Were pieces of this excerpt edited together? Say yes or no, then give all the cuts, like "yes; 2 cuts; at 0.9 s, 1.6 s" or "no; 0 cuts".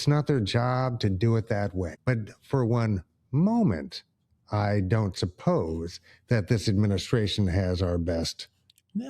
yes; 1 cut; at 1.9 s